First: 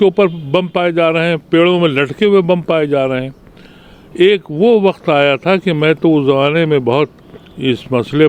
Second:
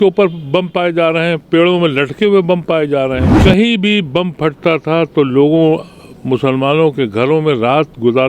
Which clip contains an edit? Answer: second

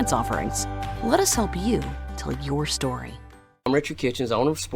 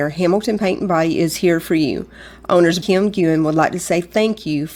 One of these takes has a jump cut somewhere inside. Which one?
first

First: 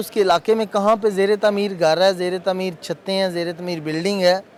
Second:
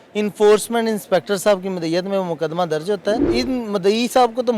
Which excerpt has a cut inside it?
second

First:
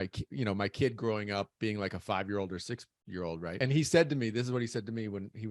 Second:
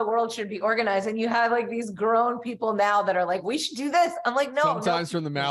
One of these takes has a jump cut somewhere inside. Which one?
first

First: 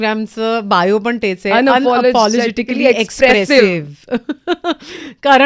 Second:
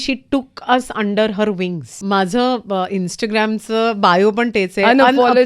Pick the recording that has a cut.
second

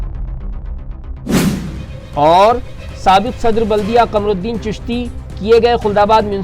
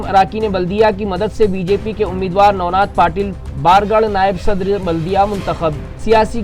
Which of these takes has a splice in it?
first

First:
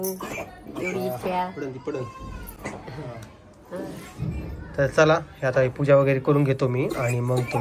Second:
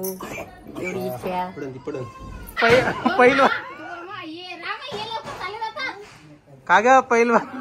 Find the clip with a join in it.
second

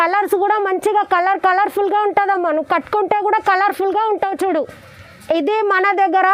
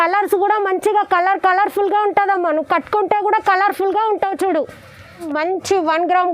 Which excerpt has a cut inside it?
second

